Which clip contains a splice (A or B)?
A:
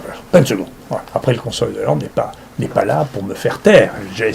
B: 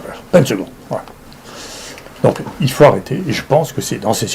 A